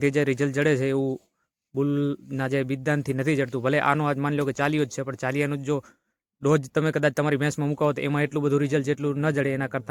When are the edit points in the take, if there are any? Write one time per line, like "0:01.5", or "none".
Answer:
none